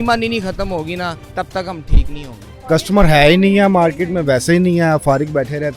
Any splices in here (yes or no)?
yes